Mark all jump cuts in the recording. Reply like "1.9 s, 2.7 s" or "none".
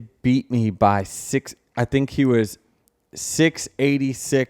none